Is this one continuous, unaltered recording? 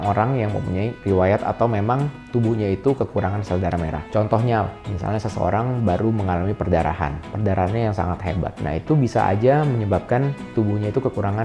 yes; 0 cuts

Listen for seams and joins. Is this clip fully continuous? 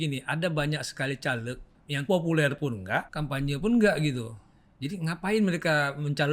no; 2 cuts; at 2.0 s, 3.1 s

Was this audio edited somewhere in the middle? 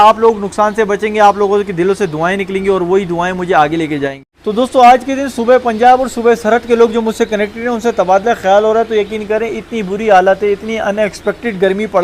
yes; 1 cut; at 4.3 s

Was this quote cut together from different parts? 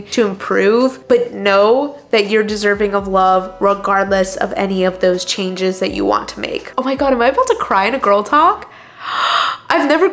yes; 1 cut; at 6.7 s

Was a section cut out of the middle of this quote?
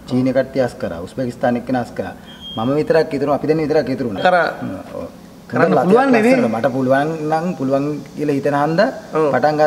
yes; 1 cut; at 4.2 s

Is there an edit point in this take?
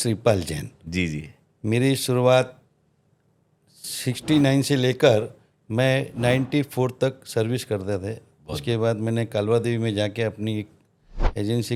no; 0 cuts

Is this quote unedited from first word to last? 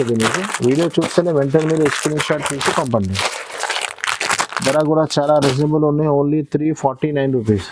yes; 0 cuts

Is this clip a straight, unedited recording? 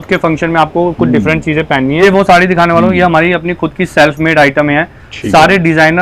no; 1 cut; at 2.0 s

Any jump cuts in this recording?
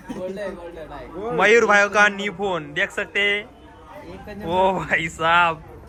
no; 0 cuts

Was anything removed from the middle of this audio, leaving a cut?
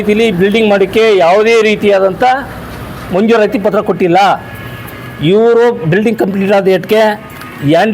no; 0 cuts

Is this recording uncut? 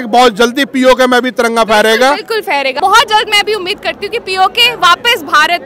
no; 1 cut; at 2.7 s

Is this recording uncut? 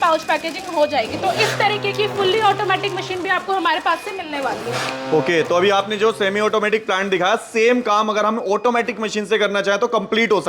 yes; 0 cuts

